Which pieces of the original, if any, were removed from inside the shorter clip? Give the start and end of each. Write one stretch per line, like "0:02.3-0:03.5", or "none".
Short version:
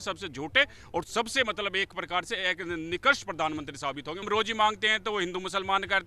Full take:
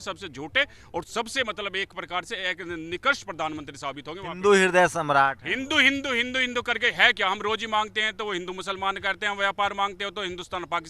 0:04.2-0:07.4